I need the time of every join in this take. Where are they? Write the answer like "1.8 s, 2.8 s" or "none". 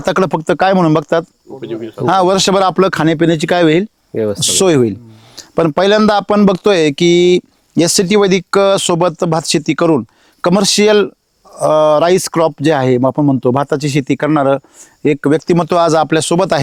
none